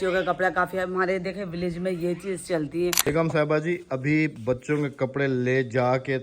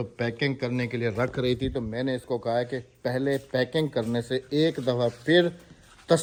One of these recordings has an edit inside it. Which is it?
first; 1 cut; at 3.0 s

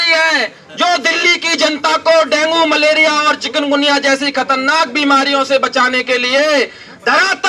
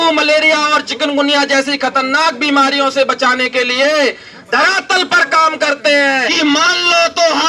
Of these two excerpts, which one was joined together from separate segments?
second; 1 cut; at 6.3 s

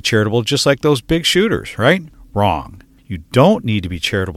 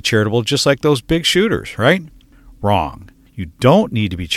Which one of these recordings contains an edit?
first; 1 cut; at 2.2 s

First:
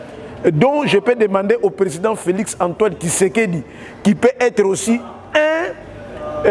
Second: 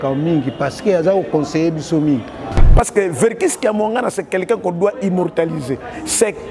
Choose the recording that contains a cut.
second; 1 cut; at 2.6 s

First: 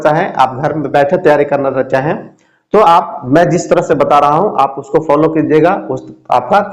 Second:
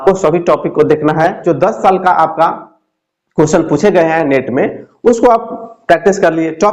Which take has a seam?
second; 1 cut; at 1.4 s

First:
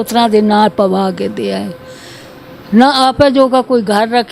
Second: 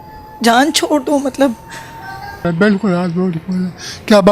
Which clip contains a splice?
second; 1 cut; at 2.4 s

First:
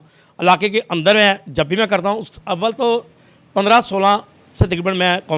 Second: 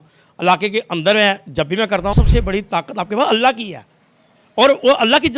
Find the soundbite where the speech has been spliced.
second; 1 cut; at 2.1 s

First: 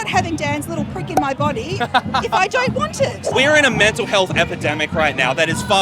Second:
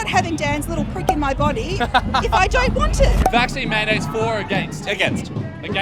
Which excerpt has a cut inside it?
first; 1 cut; at 3.1 s

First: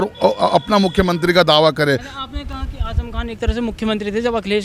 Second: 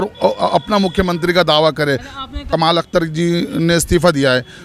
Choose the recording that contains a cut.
second; 1 cut; at 2.4 s

